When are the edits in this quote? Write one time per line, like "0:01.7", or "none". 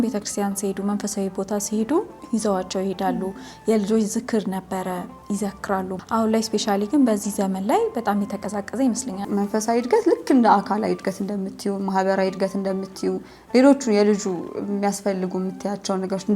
0:06.0
0:09.2